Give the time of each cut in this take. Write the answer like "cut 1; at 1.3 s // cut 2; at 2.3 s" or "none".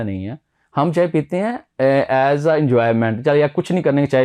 none